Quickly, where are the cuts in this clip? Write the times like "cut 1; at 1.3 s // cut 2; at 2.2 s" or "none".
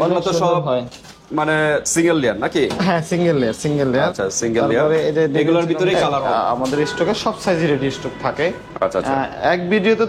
cut 1; at 6.1 s